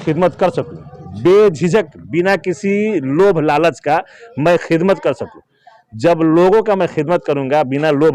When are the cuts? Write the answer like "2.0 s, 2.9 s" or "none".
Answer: none